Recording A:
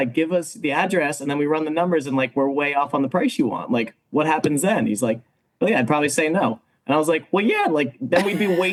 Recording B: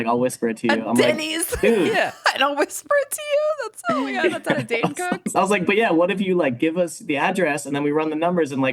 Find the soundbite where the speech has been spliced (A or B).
B